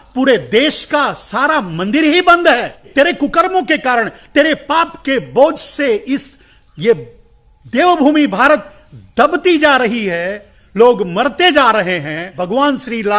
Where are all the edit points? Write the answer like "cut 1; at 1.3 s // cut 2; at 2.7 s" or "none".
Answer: cut 1; at 2.9 s // cut 2; at 12.3 s